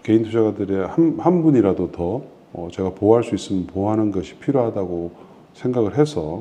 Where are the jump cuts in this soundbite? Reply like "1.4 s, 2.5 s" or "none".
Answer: none